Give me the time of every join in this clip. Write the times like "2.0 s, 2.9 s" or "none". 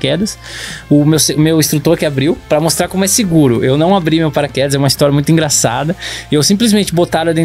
2.4 s